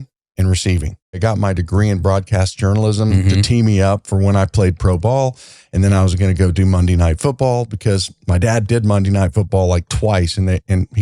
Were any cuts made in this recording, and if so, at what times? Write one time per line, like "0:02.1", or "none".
0:01.2